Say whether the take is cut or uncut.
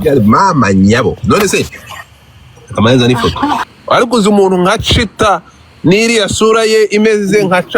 cut